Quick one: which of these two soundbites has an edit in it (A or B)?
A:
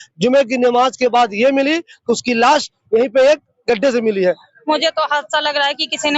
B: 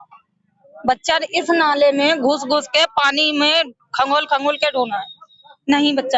A